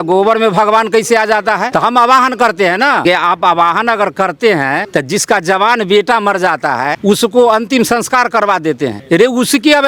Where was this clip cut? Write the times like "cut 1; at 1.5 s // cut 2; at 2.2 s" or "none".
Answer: cut 1; at 1.7 s // cut 2; at 3.0 s // cut 3; at 4.9 s // cut 4; at 7.0 s // cut 5; at 9.0 s